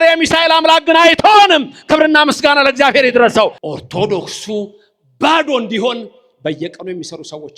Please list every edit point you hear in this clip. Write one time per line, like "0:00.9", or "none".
0:03.6